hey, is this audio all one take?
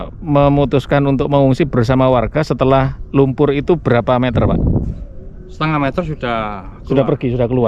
yes; 0 cuts

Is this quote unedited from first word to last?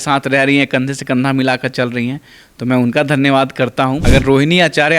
no; 1 cut; at 4.0 s

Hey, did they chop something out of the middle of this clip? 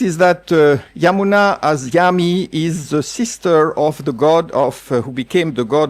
no; 0 cuts

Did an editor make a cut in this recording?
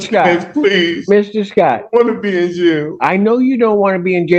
no; 0 cuts

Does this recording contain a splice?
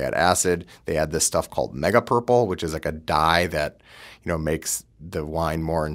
no; 0 cuts

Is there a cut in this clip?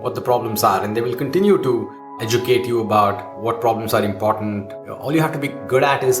yes; 2 cuts; at 2.2 s, 5.2 s

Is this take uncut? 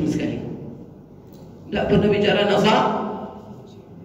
yes; 0 cuts

